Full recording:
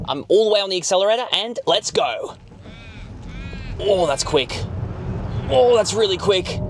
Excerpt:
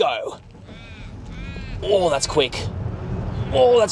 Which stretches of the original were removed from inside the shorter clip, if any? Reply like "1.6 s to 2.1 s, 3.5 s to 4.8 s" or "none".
none